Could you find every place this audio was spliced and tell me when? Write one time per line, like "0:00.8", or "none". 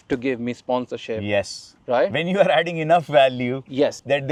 none